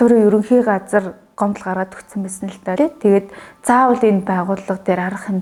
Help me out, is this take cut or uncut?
uncut